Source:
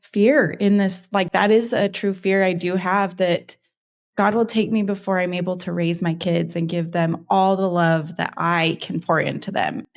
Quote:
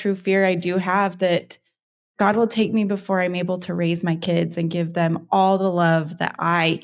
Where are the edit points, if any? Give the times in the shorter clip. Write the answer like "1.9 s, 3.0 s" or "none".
none